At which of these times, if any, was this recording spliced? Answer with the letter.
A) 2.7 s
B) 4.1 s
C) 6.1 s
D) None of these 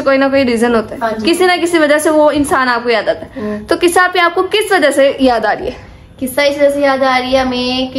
D